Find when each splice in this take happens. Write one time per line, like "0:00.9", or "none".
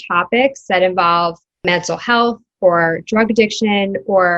0:01.6